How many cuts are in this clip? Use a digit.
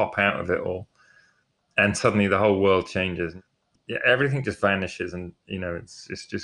1